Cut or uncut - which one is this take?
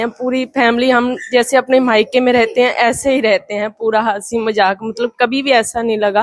uncut